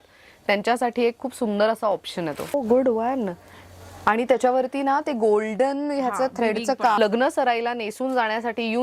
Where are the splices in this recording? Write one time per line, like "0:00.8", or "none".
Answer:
0:02.5
0:07.0